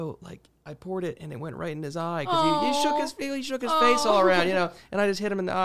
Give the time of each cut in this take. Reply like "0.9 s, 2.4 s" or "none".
none

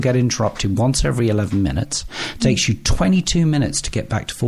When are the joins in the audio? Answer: none

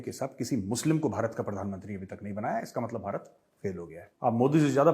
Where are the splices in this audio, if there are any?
4.0 s

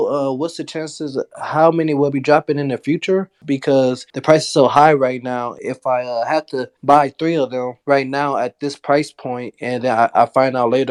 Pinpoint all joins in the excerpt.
none

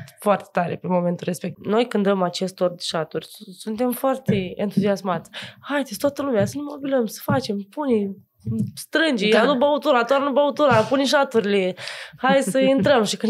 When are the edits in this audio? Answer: 1.5 s

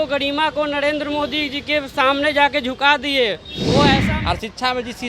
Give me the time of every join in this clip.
4.0 s

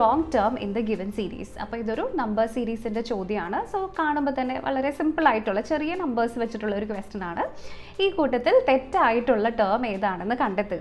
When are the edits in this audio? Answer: none

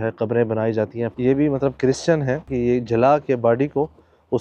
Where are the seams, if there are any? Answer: 1.1 s, 2.5 s

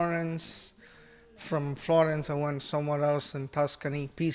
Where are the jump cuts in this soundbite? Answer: none

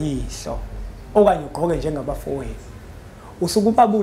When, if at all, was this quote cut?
none

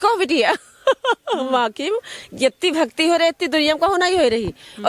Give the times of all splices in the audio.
none

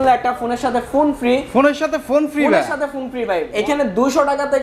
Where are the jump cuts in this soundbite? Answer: 3.5 s

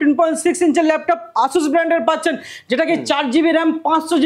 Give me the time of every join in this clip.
none

